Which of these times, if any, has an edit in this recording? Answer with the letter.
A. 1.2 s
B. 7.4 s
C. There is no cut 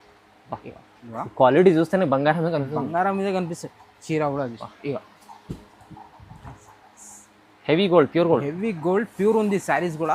A